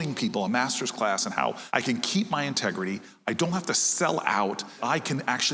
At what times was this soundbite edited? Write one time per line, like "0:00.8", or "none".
0:01.6
0:04.8